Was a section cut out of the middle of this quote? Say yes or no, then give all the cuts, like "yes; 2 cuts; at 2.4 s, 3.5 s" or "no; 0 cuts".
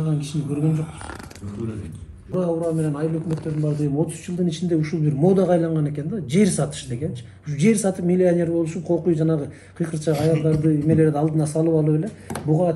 yes; 1 cut; at 2.3 s